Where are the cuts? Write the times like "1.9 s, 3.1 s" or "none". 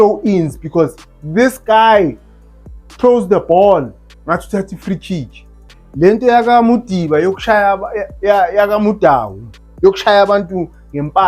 5.7 s